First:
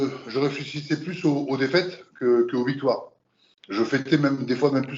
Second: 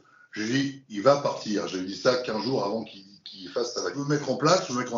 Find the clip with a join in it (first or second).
second